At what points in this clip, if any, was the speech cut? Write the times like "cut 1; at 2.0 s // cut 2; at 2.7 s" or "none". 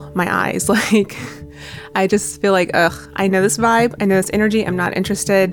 none